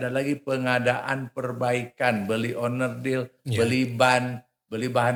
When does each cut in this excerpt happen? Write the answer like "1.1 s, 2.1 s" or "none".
none